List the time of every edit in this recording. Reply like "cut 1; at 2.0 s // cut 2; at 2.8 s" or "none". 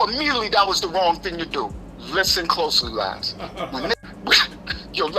cut 1; at 4.0 s